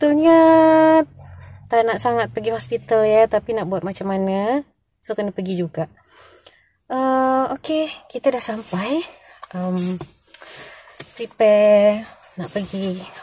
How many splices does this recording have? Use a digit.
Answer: 0